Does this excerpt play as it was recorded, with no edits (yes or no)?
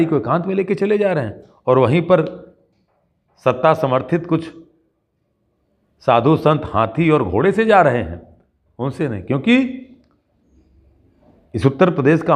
yes